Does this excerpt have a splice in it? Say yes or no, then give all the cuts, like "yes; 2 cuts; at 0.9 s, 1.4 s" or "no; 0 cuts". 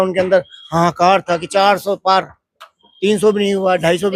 no; 0 cuts